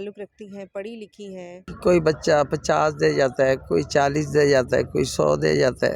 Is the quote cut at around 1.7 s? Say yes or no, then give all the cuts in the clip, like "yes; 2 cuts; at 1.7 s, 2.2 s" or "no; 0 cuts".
yes; 1 cut; at 1.7 s